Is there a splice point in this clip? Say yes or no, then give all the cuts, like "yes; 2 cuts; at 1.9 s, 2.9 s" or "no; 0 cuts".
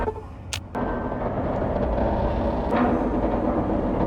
no; 0 cuts